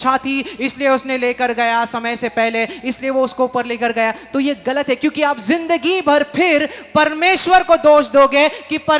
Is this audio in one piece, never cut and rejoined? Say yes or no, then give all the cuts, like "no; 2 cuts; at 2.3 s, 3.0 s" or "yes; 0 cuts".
yes; 0 cuts